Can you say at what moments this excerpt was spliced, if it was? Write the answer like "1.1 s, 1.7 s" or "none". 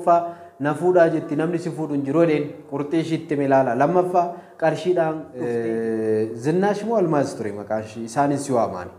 5.3 s